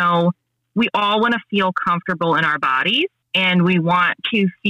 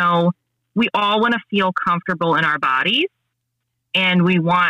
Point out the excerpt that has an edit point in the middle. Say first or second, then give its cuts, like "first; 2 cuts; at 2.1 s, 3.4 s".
first; 1 cut; at 3.2 s